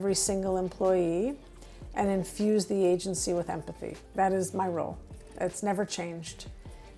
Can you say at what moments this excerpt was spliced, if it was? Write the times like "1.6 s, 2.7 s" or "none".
none